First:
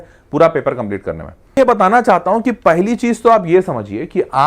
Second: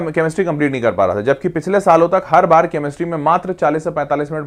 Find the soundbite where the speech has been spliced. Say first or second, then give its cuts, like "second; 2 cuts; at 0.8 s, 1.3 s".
first; 1 cut; at 1.6 s